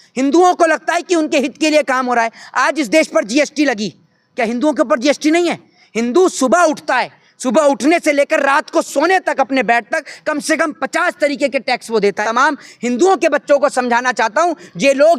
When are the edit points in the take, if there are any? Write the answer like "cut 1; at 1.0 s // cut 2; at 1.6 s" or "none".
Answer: cut 1; at 12.2 s